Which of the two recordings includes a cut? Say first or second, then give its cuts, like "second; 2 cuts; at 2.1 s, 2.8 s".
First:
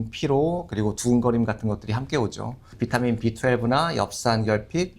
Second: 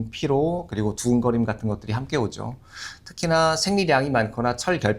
first; 1 cut; at 2.6 s